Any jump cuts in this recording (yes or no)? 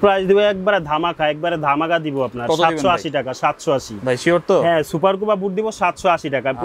no